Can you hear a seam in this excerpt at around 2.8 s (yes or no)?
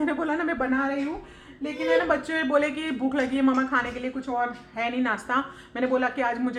no